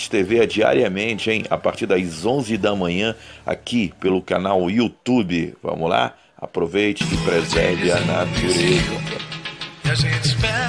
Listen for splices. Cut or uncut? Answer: uncut